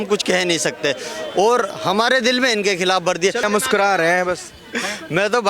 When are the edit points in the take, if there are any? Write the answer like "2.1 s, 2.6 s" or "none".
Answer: 3.4 s